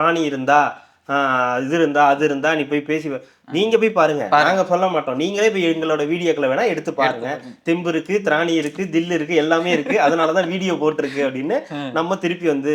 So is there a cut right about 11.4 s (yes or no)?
no